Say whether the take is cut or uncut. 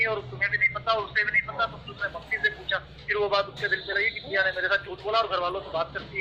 uncut